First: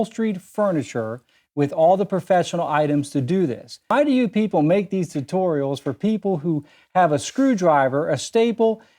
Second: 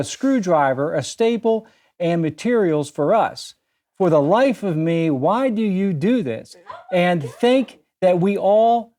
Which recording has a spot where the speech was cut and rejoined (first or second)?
first